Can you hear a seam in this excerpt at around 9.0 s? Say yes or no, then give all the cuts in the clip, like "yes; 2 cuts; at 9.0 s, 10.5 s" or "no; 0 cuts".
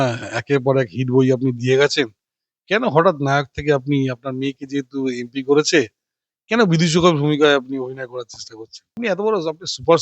yes; 1 cut; at 9.0 s